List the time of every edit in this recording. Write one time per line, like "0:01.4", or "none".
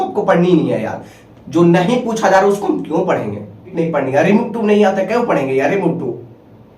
0:03.7